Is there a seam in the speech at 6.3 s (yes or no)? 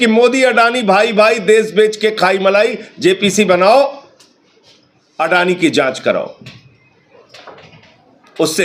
no